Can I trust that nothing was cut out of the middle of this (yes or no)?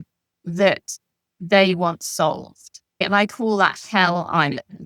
no